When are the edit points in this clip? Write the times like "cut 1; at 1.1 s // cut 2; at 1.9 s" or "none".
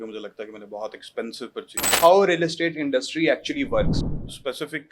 cut 1; at 1.9 s // cut 2; at 4.0 s